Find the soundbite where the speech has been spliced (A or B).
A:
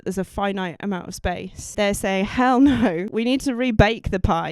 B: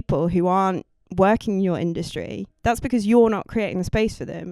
A